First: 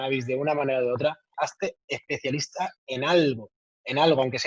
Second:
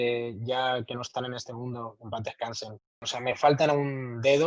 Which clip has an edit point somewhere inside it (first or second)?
second